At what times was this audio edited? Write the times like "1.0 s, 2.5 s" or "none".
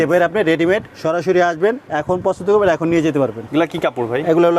0.9 s, 1.9 s, 3.4 s